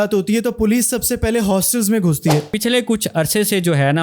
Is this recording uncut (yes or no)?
no